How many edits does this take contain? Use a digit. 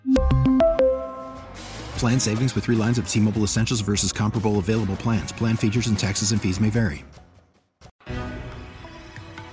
1